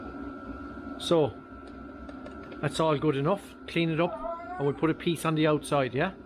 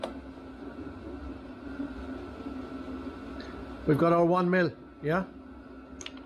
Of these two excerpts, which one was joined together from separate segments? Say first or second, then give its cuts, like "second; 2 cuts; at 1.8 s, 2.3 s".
second; 1 cut; at 1.7 s